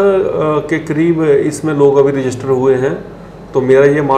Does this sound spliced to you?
no; 0 cuts

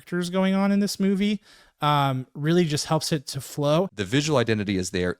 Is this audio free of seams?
no; 1 cut; at 3.9 s

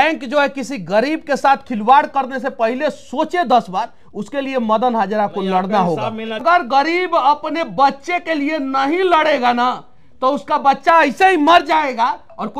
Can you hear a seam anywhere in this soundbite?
yes; 1 cut; at 6.4 s

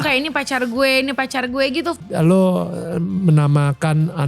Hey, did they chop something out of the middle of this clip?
yes; 1 cut; at 2.0 s

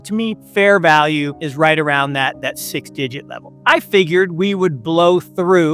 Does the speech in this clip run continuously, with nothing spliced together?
no; 2 cuts; at 1.4 s, 3.4 s

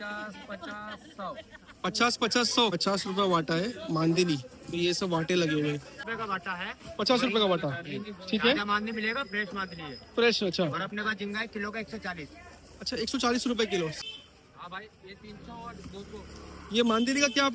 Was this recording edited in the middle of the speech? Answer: yes; 3 cuts; at 2.8 s, 5.9 s, 13.9 s

